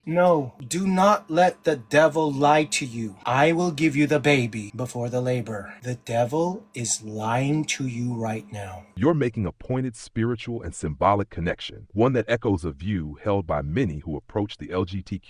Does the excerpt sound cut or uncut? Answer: uncut